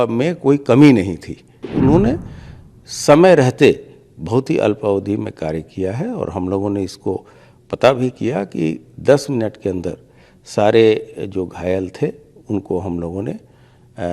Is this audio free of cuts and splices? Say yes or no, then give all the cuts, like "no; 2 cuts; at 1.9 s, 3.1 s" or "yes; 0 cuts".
no; 1 cut; at 1.6 s